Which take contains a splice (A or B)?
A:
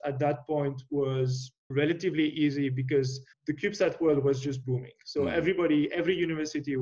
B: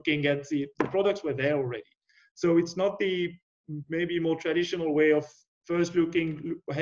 A